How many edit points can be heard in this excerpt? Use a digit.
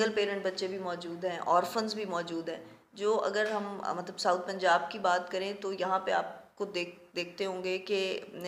0